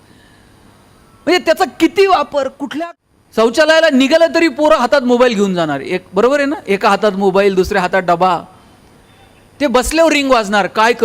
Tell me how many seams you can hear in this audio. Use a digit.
1